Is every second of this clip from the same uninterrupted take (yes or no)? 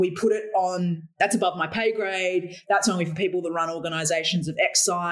no